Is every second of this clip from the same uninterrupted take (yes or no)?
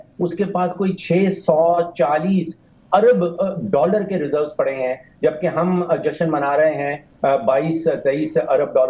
yes